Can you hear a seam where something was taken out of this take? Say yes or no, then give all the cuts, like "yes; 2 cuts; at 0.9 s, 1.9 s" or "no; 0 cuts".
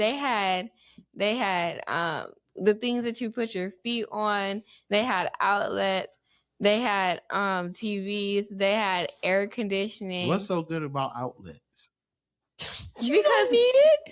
no; 0 cuts